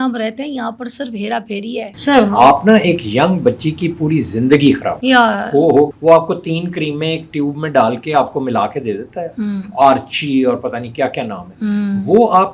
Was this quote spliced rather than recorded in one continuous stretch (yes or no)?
yes